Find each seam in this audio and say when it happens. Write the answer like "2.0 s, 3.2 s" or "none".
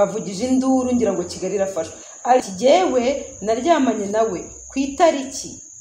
2.4 s